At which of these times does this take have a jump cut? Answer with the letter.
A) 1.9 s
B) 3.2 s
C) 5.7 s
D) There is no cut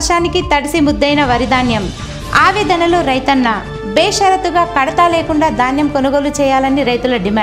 D